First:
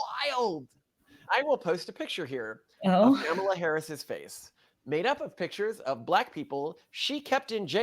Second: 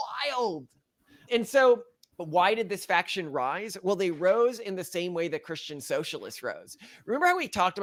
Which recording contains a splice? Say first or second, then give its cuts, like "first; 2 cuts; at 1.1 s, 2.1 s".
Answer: first; 1 cut; at 1.2 s